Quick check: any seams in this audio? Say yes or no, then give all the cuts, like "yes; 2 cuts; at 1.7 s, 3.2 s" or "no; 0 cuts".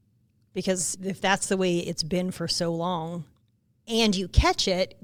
no; 0 cuts